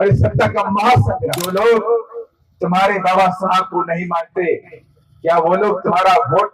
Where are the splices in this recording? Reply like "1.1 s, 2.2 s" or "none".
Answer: 1.3 s